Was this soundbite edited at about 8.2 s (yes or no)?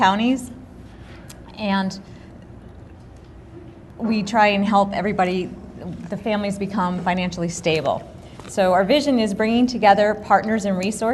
no